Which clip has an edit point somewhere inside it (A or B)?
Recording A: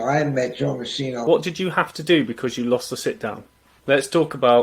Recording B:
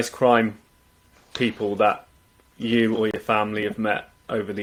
A